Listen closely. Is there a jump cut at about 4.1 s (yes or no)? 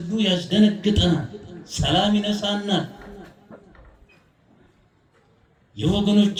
no